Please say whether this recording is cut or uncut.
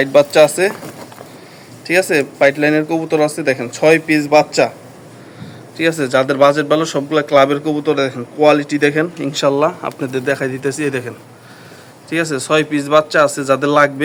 uncut